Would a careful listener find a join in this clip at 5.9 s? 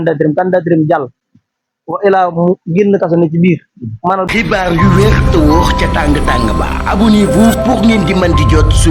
no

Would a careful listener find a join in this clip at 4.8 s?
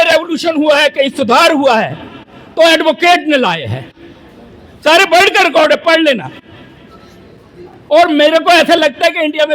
no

